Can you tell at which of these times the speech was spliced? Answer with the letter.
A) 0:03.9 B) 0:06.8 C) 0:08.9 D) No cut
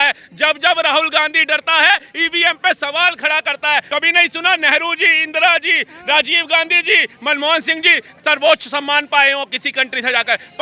A